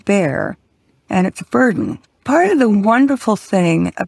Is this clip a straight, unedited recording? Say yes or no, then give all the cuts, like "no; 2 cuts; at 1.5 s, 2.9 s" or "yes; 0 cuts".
no; 1 cut; at 2.2 s